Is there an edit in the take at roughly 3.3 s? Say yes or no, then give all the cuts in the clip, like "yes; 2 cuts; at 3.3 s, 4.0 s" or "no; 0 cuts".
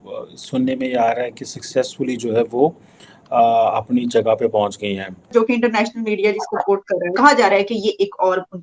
no; 2 cuts; at 5.3 s, 7.2 s